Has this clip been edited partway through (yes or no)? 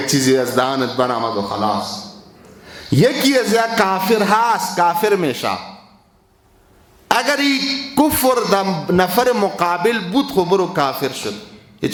no